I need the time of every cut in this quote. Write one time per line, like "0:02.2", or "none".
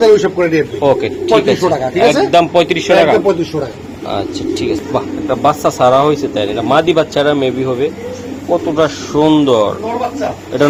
none